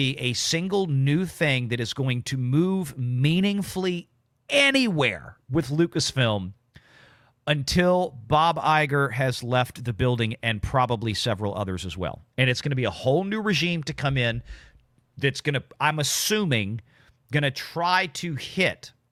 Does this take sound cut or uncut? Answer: uncut